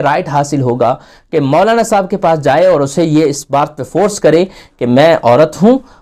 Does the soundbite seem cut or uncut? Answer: uncut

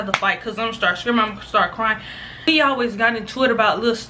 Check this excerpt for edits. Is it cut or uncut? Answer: cut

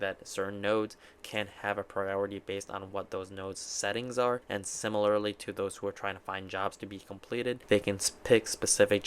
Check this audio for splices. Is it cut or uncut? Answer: cut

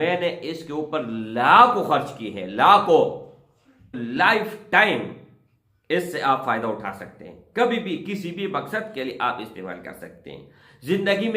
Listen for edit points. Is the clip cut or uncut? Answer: cut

